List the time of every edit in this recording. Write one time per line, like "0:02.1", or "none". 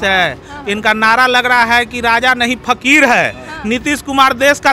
none